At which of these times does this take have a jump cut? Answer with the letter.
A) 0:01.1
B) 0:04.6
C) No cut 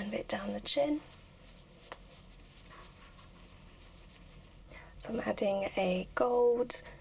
B